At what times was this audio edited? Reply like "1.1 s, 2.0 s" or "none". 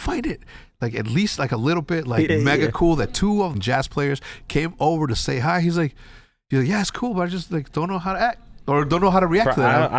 2.3 s, 3.6 s